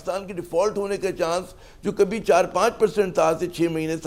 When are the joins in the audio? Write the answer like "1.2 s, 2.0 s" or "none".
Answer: none